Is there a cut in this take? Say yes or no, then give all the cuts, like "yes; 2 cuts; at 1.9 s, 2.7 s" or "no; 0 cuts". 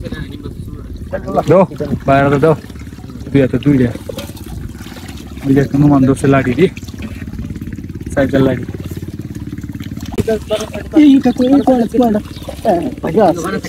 yes; 1 cut; at 10.2 s